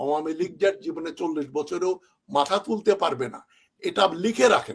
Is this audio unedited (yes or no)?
yes